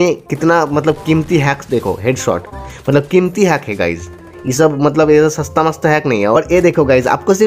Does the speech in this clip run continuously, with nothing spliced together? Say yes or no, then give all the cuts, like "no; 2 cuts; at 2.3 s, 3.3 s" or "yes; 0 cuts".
yes; 0 cuts